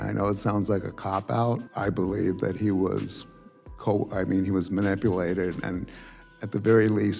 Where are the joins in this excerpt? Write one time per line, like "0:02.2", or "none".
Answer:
0:01.7